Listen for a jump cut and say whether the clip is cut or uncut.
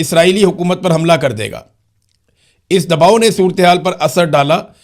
uncut